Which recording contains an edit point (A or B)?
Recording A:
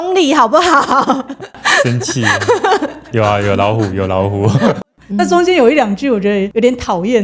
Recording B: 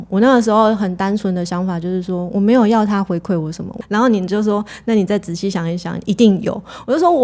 A